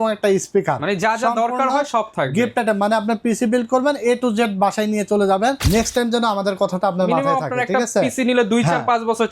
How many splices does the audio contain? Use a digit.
1